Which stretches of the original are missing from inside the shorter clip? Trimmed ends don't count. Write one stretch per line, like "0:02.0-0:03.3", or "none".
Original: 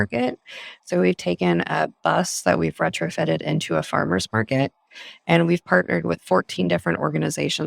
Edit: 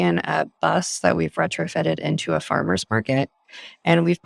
none